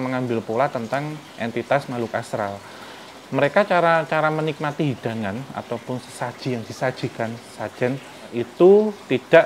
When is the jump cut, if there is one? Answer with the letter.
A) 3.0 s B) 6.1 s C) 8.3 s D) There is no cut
C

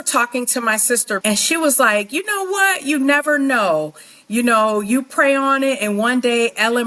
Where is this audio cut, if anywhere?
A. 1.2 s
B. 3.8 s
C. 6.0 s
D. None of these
A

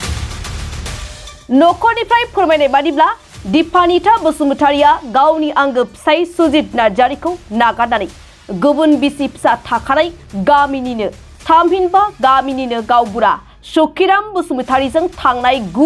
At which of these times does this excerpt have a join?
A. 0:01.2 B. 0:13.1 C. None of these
A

